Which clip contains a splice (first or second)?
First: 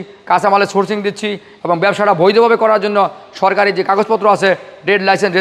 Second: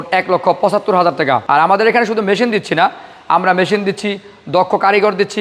second